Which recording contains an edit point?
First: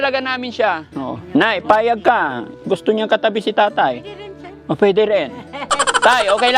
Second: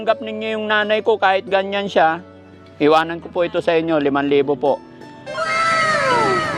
first; 1 cut; at 1.2 s

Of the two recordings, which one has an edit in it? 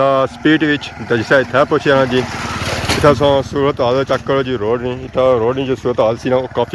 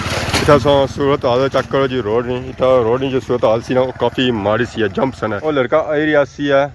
second; 1 cut; at 5.4 s

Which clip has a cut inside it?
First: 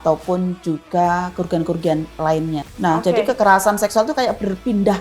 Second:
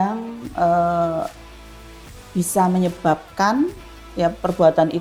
first; 1 cut; at 2.7 s

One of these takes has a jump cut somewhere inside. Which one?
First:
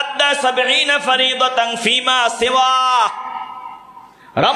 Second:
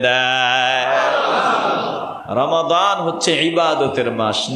second; 1 cut; at 2.1 s

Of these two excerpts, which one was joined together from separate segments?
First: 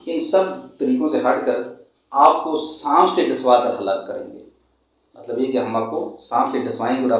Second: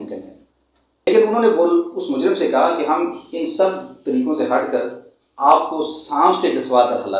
second; 1 cut; at 1.1 s

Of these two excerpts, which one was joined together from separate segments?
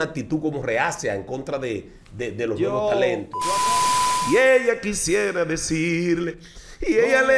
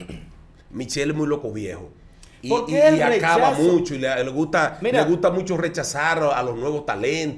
first; 1 cut; at 3.8 s

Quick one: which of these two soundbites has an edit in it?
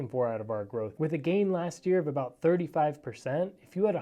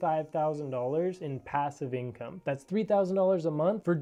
first; 1 cut; at 0.9 s

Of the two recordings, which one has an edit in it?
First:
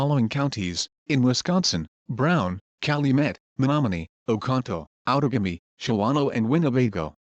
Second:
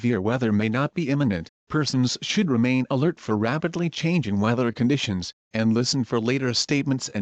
first; 2 cuts; at 1.8 s, 6.1 s

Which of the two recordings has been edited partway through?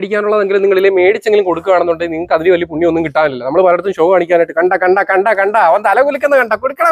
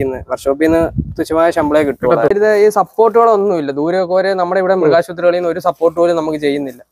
second; 1 cut; at 2.3 s

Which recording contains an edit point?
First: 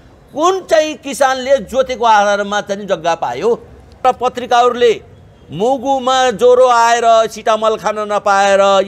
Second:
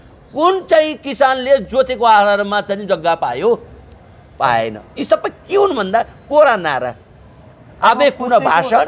first; 1 cut; at 4.0 s

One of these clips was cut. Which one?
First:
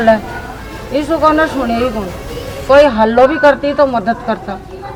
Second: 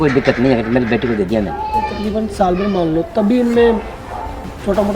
second; 1 cut; at 1.9 s

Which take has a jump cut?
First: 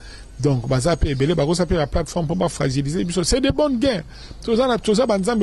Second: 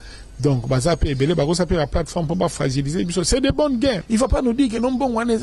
second; 1 cut; at 4.0 s

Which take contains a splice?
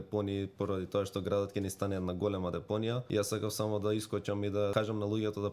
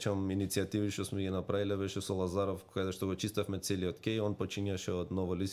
first; 2 cuts; at 3.0 s, 4.7 s

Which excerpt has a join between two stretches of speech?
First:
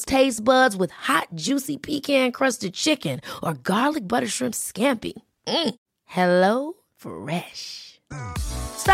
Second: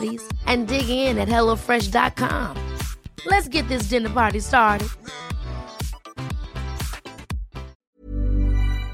second; 1 cut; at 7.8 s

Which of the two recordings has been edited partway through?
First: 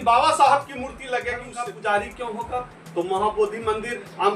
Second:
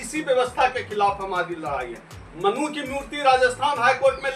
first; 1 cut; at 1.5 s

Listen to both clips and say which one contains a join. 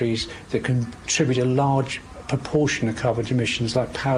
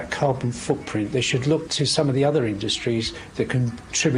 second; 1 cut; at 1.7 s

